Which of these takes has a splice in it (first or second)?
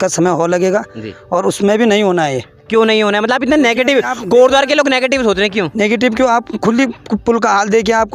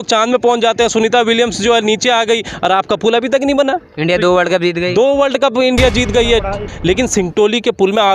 second